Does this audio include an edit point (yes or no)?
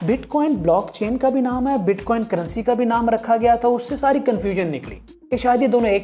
no